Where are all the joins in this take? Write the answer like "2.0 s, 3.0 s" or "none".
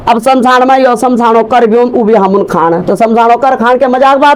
none